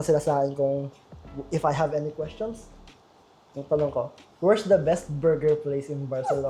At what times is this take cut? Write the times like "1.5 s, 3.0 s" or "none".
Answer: none